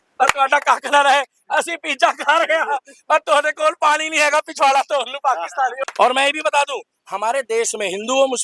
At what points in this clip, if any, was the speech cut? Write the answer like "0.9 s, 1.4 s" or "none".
5.8 s